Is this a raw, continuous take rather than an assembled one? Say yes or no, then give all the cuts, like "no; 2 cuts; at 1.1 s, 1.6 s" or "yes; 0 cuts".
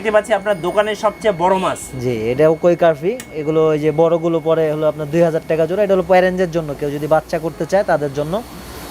yes; 0 cuts